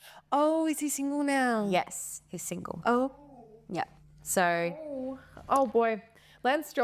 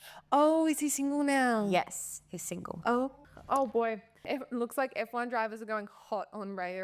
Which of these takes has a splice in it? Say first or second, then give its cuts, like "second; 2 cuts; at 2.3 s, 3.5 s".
second; 2 cuts; at 3.3 s, 4.2 s